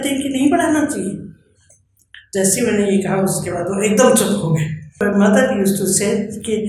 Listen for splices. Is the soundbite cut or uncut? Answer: cut